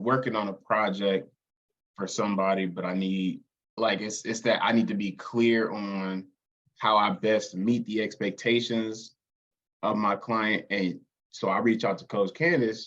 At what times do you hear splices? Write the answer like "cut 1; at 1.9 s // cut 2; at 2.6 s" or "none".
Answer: none